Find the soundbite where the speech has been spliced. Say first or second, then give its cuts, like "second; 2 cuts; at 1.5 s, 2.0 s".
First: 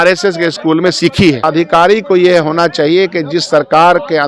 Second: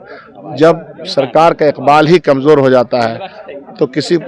first; 1 cut; at 1.4 s